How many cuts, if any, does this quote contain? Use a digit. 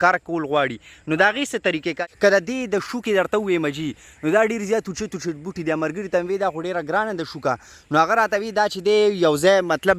1